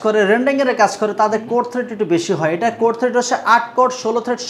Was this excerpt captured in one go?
yes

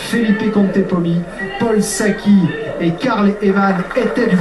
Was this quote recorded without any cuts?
no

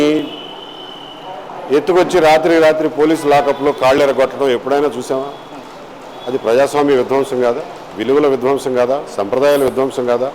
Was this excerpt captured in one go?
yes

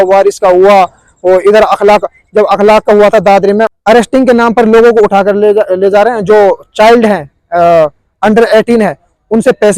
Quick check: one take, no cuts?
no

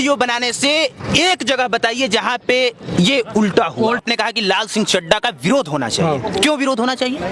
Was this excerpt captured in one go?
no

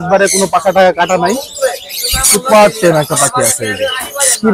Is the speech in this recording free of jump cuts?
yes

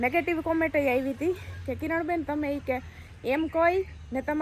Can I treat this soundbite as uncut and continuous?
yes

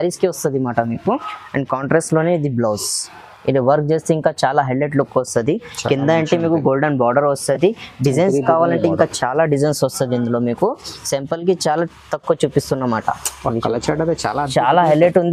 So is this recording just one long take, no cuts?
yes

